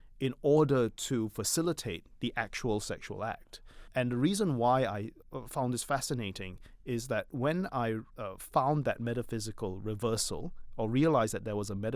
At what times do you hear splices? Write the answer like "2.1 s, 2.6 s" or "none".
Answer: 3.9 s, 5.2 s, 8.1 s

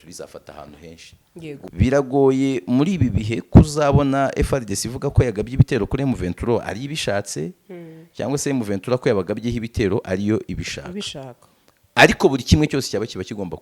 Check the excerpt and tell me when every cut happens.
1.7 s

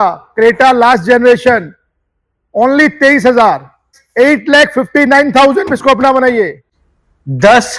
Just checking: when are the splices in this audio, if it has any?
4.0 s, 6.9 s

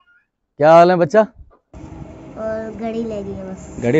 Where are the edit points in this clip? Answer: 1.6 s

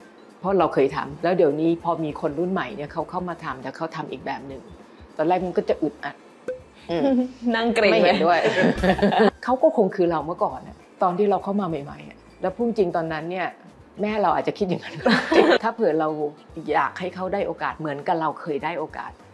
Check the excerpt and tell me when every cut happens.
1.1 s, 9.4 s, 15.6 s

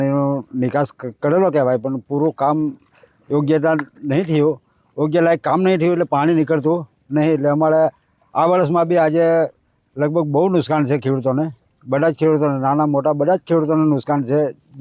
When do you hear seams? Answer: none

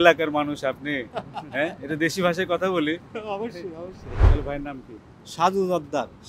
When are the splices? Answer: 4.3 s

